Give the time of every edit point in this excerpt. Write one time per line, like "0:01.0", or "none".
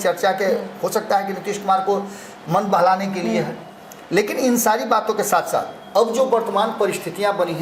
none